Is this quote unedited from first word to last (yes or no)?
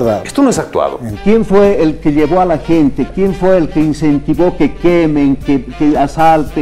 no